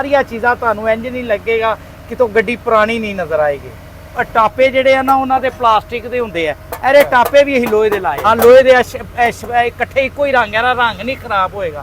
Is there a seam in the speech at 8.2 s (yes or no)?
yes